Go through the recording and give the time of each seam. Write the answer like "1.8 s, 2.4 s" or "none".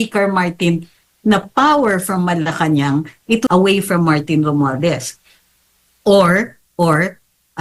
3.4 s